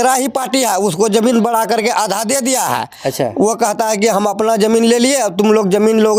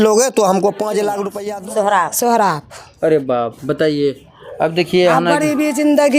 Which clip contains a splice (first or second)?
second